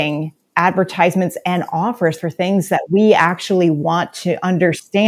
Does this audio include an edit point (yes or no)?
no